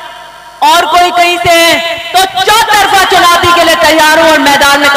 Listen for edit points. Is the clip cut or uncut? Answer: uncut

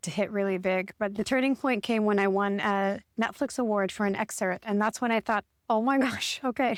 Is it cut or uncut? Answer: uncut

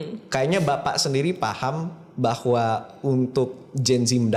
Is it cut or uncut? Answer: uncut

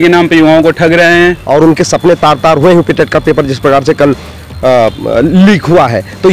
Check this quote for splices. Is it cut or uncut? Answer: cut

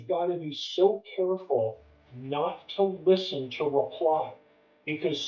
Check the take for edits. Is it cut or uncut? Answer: uncut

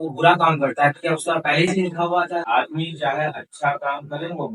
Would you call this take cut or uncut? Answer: cut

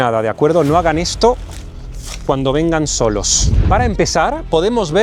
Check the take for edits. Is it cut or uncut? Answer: cut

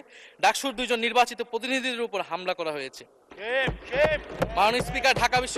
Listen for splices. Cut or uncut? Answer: uncut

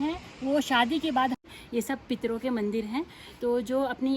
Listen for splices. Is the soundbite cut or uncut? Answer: cut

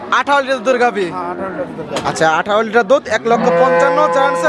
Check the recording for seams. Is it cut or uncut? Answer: uncut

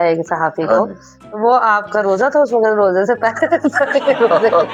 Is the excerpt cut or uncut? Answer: uncut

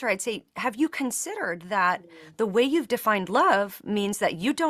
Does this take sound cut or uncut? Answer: uncut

